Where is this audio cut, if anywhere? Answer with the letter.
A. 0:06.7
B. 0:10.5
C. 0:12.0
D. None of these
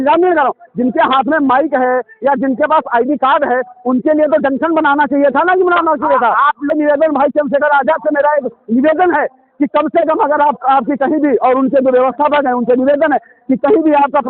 A